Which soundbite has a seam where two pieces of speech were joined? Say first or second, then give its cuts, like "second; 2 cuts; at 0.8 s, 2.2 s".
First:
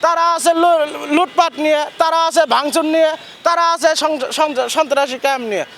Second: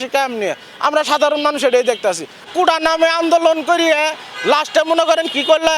second; 1 cut; at 2.4 s